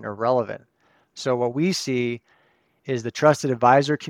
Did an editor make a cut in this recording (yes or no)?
no